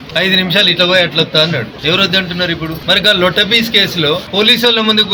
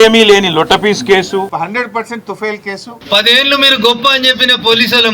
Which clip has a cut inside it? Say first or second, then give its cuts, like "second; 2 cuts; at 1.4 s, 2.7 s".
second; 2 cuts; at 1.5 s, 2.9 s